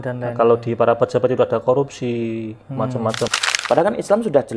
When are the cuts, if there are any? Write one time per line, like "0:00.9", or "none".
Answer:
0:03.3